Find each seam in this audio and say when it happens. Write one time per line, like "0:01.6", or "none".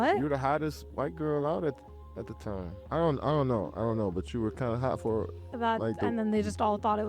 0:06.0